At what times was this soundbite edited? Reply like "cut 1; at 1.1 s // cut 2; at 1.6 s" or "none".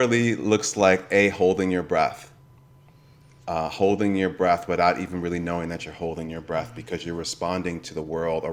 none